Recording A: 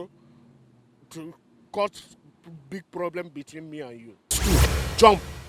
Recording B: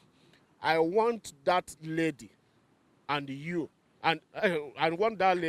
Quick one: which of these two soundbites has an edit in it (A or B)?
A